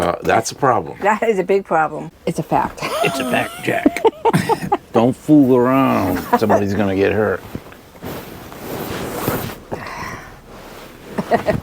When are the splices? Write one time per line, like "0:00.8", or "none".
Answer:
0:02.1